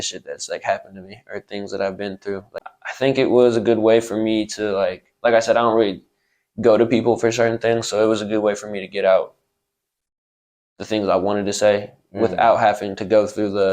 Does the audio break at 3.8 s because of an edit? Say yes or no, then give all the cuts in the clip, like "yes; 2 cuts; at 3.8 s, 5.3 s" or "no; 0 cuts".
no; 1 cut; at 2.6 s